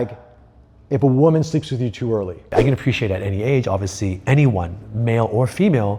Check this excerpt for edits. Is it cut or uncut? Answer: cut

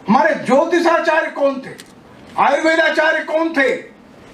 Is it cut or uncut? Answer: uncut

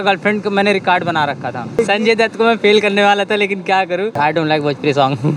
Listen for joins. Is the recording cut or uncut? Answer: cut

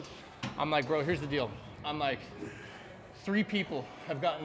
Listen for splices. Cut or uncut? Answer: uncut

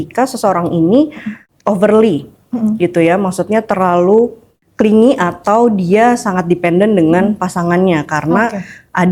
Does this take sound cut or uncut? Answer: uncut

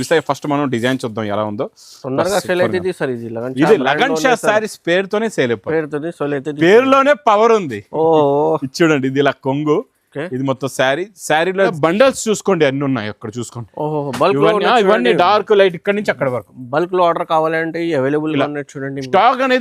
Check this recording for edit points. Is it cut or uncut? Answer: cut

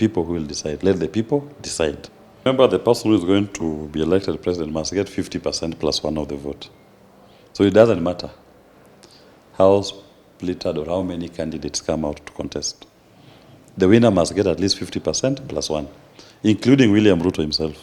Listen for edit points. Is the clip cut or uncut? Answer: cut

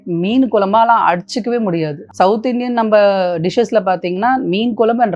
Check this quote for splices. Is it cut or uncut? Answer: cut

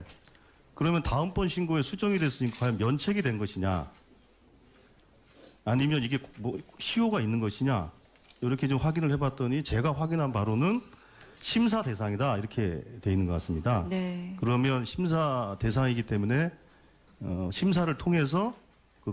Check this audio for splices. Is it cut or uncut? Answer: uncut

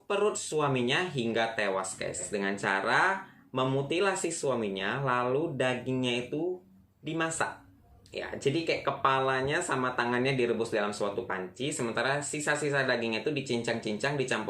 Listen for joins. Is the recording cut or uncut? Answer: cut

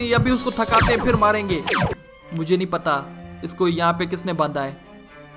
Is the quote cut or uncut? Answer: cut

